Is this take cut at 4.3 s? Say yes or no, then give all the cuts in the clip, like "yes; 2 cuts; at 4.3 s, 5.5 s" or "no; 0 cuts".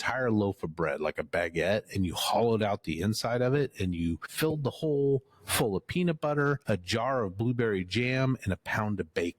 yes; 2 cuts; at 4.3 s, 6.6 s